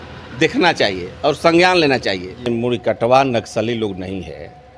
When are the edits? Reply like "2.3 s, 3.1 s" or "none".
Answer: 2.5 s